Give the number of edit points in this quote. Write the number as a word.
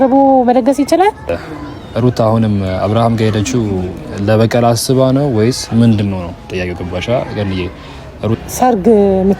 two